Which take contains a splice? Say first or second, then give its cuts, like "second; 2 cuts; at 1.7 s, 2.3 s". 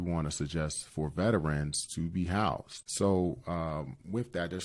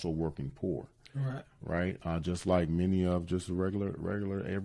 first; 1 cut; at 2.8 s